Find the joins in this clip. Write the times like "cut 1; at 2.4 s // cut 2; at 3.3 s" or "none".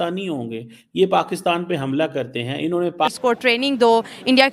cut 1; at 3.1 s